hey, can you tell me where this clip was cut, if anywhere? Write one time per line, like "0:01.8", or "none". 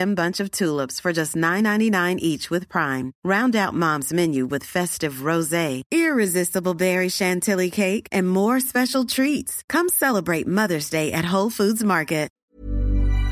0:12.4